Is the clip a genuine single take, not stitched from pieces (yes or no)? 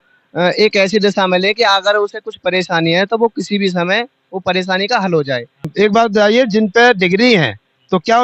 no